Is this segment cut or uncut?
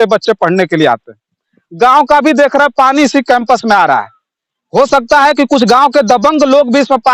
cut